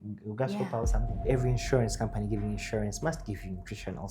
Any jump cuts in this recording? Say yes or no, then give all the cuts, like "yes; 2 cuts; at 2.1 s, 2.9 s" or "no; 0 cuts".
yes; 1 cut; at 1.2 s